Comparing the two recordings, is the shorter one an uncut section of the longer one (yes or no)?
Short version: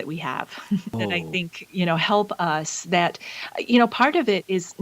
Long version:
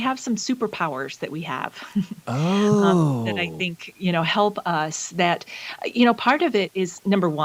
no